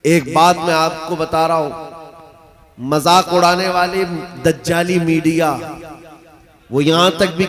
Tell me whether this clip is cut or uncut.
uncut